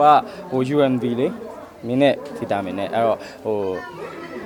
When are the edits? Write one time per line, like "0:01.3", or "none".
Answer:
none

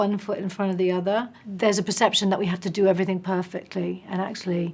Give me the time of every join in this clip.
0:01.4

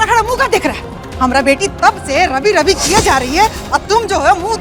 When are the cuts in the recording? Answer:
none

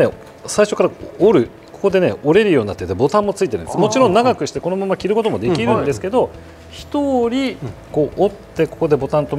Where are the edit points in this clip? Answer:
none

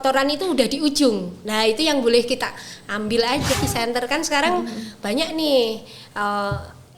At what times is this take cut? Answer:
0:03.6

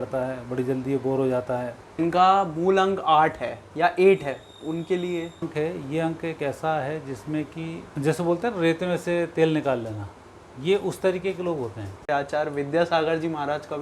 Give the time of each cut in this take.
0:02.0
0:05.5
0:07.8
0:12.1

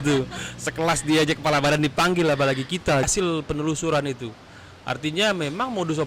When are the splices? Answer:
0:03.1

